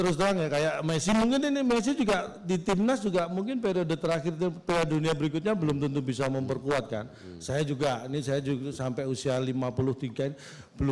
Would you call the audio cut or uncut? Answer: uncut